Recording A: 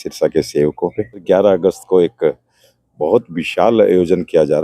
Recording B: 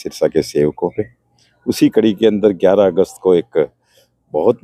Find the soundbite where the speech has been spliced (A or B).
A